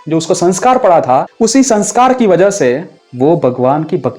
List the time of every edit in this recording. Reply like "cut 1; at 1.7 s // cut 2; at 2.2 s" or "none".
cut 1; at 1.3 s // cut 2; at 3.0 s